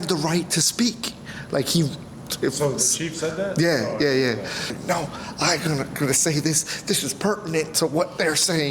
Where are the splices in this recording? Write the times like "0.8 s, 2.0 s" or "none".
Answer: 4.8 s